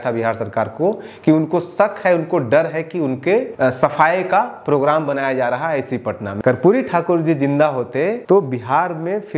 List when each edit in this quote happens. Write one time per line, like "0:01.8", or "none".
0:03.5
0:06.3
0:08.2

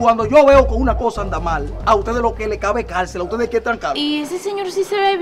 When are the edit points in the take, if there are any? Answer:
0:04.0

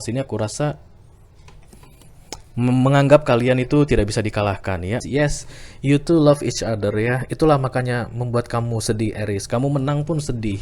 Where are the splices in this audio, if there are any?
0:05.0

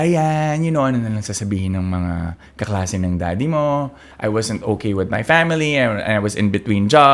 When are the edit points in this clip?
0:04.0

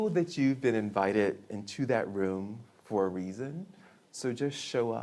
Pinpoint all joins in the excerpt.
none

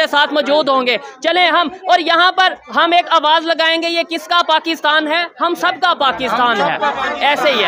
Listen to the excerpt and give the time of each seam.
none

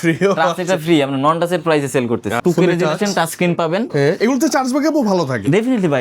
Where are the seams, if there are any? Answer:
0:02.3

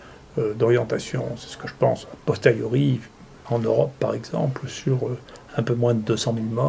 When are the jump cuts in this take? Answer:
0:03.4

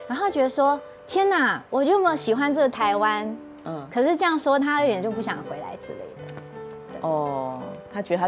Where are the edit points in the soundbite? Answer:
none

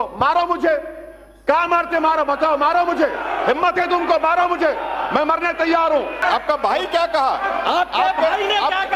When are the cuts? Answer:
0:06.1

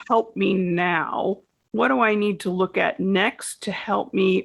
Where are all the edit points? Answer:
0:01.5

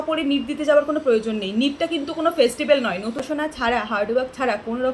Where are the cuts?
0:03.2

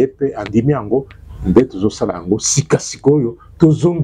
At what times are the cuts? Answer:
none

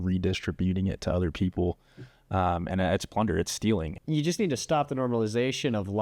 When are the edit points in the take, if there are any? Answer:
0:03.9

